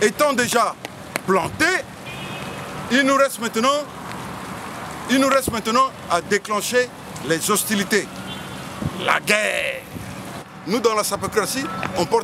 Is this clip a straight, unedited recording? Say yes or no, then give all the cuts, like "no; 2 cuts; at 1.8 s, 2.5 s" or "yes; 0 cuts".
no; 1 cut; at 10.5 s